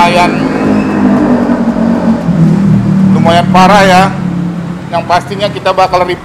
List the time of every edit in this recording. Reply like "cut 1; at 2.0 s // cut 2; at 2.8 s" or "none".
none